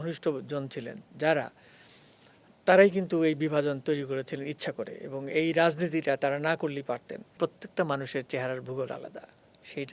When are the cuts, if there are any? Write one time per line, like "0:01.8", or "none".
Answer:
0:07.4

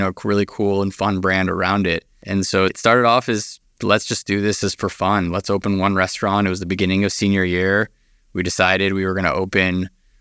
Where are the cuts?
0:02.1

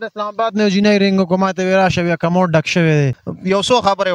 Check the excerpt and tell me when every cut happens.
0:03.2

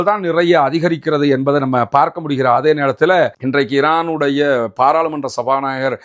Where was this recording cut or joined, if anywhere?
0:03.4

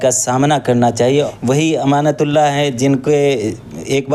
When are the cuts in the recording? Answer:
0:01.1

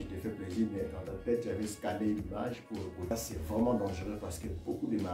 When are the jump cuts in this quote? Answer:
0:03.1

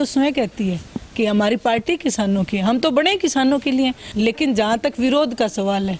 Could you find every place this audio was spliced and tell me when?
0:04.0

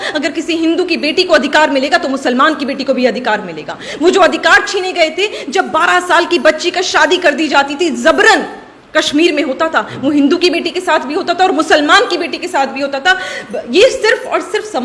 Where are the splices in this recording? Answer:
none

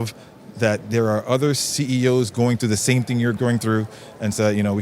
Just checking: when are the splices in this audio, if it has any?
0:03.4

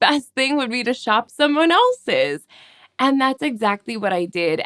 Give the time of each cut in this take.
none

